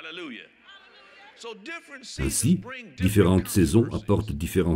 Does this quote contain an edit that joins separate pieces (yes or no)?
yes